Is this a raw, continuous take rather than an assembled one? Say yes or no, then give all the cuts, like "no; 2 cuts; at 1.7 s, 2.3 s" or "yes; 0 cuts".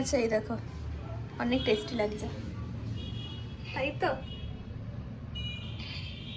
yes; 0 cuts